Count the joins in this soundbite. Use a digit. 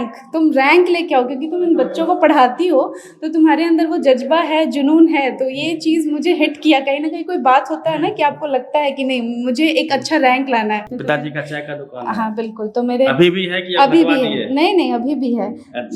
1